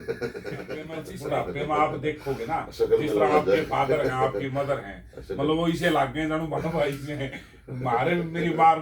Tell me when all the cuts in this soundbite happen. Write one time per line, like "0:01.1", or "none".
0:01.0